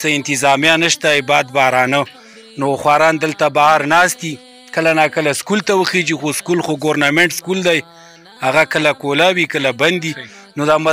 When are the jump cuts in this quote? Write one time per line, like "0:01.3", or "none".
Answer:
none